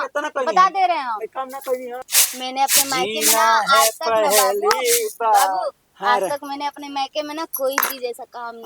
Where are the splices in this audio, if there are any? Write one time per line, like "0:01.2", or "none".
0:02.1